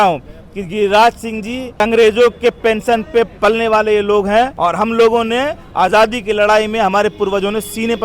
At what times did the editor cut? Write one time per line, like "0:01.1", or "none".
0:01.8
0:04.5